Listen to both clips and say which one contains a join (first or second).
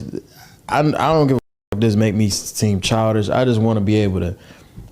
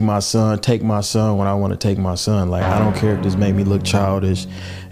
first